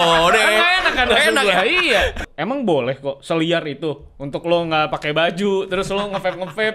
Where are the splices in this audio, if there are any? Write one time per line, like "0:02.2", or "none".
0:02.3